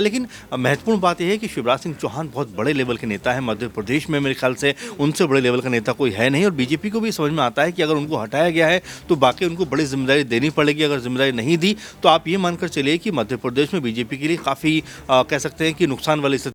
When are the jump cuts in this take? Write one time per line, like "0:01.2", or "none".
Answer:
none